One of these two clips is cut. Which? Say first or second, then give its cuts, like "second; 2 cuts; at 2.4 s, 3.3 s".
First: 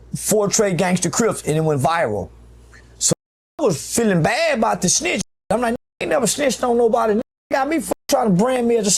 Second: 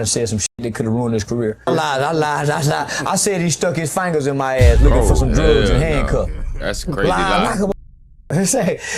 second; 1 cut; at 1.7 s